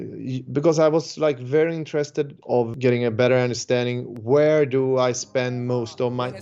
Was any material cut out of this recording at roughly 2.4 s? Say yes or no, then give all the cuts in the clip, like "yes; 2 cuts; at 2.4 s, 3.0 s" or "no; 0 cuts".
yes; 1 cut; at 2.4 s